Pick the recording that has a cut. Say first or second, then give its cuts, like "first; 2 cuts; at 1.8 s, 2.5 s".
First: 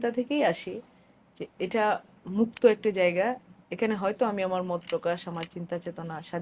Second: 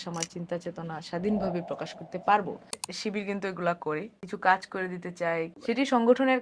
second; 3 cuts; at 2.9 s, 4.2 s, 5.6 s